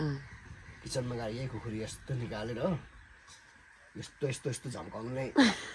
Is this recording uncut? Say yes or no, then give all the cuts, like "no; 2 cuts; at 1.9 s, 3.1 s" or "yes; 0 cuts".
yes; 0 cuts